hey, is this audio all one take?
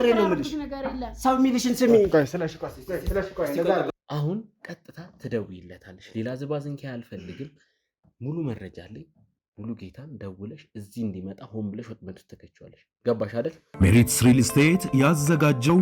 no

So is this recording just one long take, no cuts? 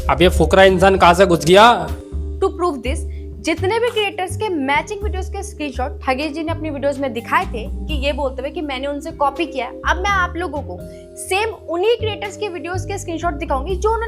no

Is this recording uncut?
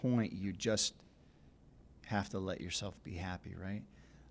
yes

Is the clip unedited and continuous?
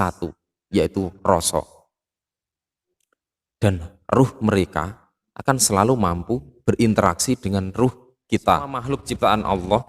no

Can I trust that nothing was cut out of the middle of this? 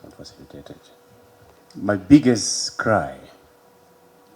no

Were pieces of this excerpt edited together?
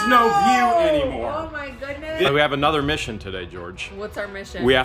yes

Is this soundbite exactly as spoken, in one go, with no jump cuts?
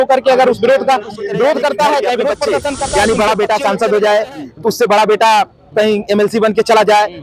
no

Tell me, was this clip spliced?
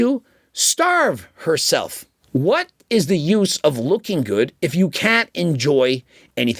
yes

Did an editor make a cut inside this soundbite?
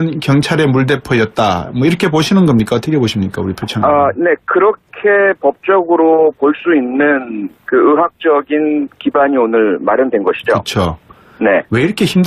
yes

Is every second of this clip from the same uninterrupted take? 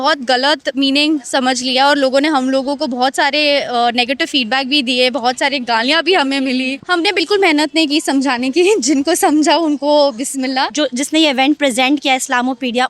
no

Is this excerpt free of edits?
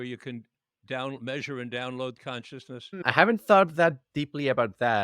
no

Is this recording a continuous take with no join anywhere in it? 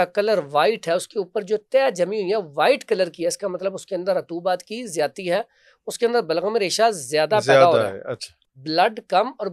yes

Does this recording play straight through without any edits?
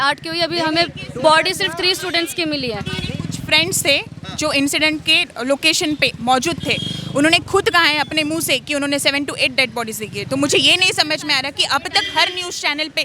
yes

